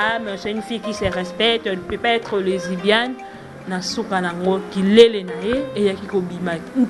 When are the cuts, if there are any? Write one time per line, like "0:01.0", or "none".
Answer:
none